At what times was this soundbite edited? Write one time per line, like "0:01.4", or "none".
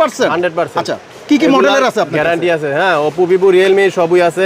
none